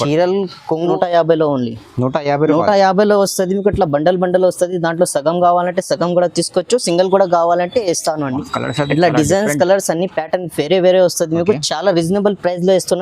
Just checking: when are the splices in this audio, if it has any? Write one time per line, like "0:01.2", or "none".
0:00.9